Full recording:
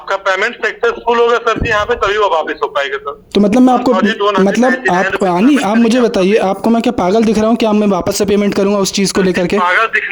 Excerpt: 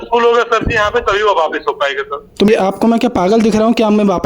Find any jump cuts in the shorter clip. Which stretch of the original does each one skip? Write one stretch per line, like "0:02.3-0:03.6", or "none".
0:03.4-0:06.3